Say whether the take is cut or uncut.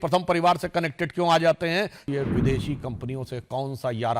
cut